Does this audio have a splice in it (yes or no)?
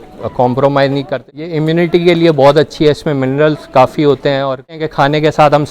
yes